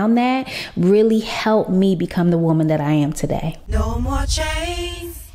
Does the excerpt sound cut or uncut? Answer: uncut